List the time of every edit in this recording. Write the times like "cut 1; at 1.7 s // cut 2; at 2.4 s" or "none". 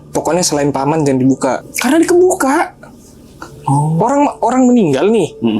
cut 1; at 1.7 s